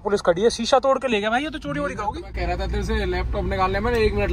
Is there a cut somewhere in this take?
no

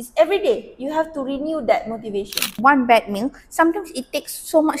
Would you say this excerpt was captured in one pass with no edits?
no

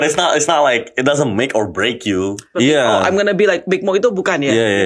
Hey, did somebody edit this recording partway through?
yes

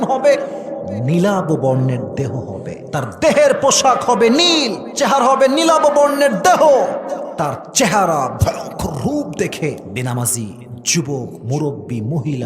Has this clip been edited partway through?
yes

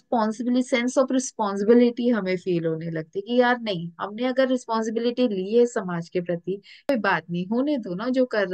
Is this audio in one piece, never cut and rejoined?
no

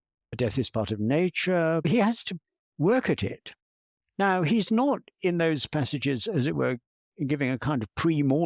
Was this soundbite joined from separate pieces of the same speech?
yes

